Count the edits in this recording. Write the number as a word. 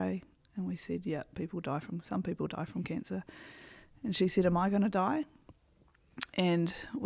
zero